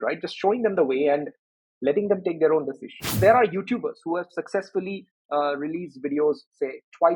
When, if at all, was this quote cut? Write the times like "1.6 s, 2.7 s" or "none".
3.2 s